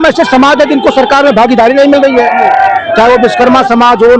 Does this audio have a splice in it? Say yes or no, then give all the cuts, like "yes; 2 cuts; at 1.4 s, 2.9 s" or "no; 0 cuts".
no; 0 cuts